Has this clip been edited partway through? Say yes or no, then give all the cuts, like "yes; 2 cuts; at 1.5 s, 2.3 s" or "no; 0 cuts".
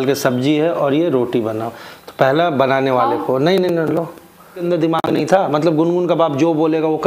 yes; 1 cut; at 4.6 s